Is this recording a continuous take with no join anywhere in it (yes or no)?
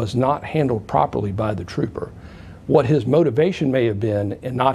yes